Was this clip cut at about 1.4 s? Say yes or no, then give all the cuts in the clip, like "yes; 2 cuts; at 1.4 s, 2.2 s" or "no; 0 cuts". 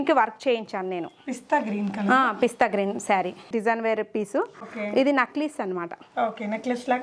no; 2 cuts; at 3.5 s, 4.6 s